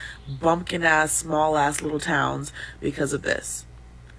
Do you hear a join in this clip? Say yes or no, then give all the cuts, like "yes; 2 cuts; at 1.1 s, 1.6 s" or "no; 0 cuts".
yes; 1 cut; at 3.1 s